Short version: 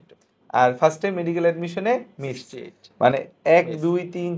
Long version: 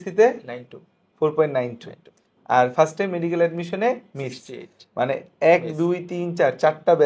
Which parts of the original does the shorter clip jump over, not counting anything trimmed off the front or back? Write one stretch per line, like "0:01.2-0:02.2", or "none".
none

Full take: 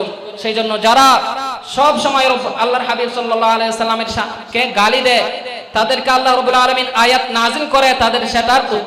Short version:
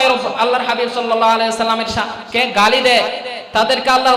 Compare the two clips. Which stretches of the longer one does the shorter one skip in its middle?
none

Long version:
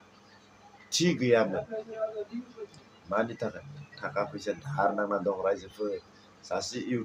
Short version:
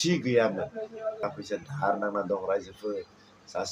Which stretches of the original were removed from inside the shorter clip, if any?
0:02.2-0:04.2

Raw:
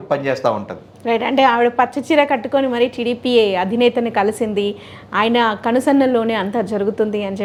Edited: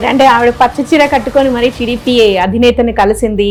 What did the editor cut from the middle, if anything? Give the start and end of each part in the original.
none

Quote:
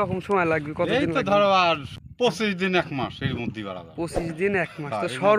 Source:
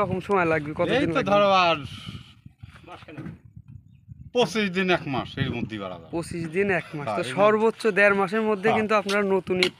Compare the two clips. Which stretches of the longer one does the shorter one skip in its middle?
0:02.0-0:04.1

